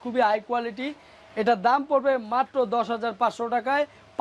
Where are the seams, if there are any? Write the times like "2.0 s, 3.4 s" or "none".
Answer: none

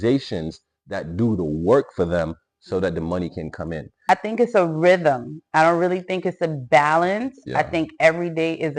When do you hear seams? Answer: 4.0 s

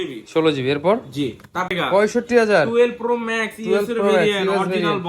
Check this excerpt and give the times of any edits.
1.6 s

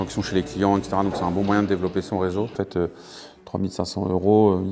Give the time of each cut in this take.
2.5 s

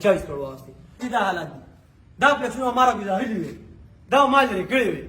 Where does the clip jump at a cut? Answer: 1.0 s

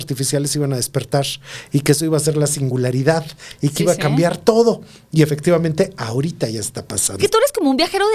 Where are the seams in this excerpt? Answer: 7.1 s

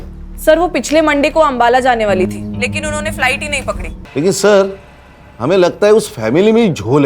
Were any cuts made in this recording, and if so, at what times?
3.9 s

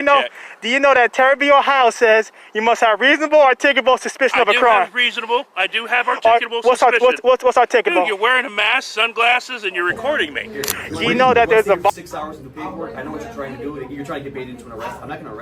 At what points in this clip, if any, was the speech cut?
11.9 s

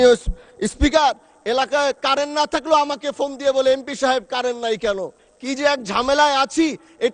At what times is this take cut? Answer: none

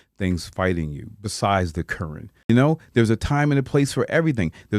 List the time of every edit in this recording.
2.5 s

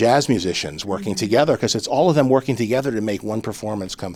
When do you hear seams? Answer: none

